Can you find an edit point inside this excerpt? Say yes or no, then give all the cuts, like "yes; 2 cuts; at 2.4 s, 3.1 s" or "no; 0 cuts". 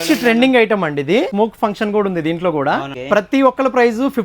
yes; 2 cuts; at 1.3 s, 2.9 s